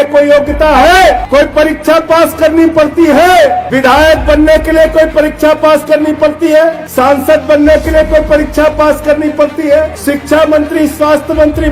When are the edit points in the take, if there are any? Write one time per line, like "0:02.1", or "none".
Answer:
0:01.2
0:03.7
0:06.8
0:10.0

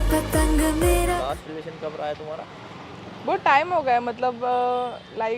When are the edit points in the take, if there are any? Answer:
0:01.2

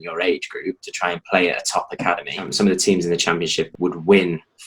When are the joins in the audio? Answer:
0:02.4

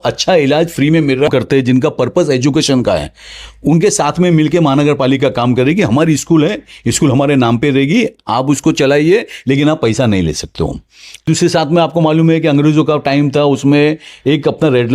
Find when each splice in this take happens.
0:01.3
0:11.3

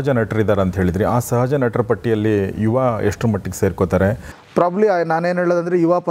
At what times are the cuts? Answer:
0:04.3

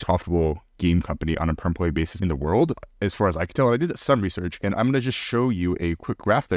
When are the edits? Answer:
none

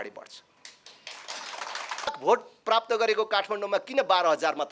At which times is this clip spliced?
0:02.2

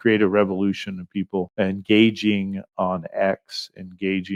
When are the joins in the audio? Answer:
none

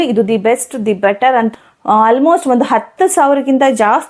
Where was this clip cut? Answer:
0:01.5

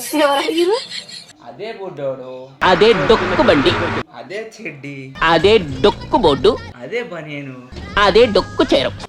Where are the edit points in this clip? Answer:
none

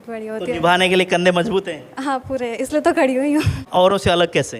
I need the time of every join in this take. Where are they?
0:03.6

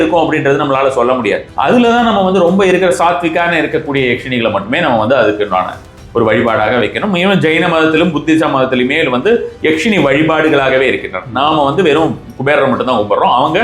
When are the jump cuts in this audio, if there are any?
0:01.5

